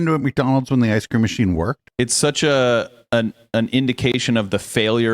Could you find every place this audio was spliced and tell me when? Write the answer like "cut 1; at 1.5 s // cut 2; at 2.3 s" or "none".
cut 1; at 1.8 s